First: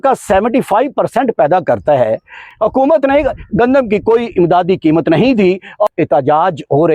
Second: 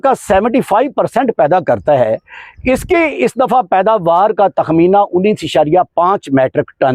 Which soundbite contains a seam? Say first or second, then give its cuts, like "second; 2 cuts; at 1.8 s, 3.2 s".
first; 2 cuts; at 2.5 s, 5.9 s